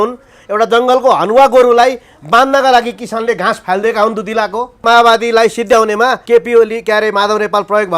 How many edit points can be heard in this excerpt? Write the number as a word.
two